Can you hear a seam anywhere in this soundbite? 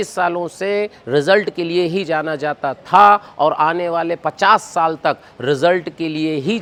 no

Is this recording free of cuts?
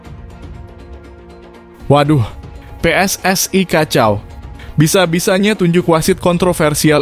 no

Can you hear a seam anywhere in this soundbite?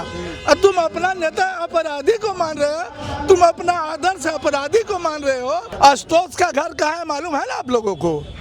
yes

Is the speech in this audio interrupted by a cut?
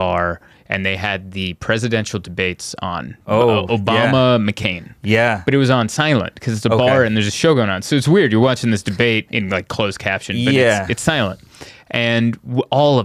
no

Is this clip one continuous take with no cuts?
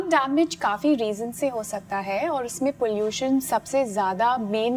yes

